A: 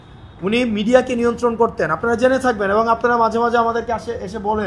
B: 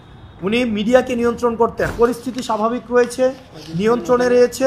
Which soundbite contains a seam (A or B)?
B